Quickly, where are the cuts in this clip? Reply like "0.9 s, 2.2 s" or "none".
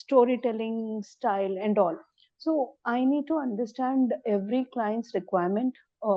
none